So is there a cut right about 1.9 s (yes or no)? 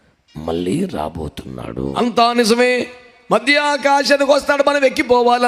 yes